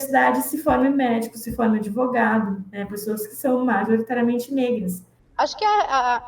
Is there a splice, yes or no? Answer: yes